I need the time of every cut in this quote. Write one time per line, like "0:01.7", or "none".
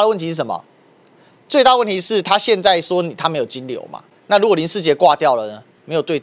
0:04.1